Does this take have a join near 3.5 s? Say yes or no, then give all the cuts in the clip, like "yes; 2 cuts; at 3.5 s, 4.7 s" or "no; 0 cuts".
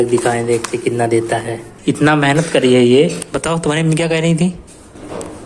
no; 1 cut; at 1.7 s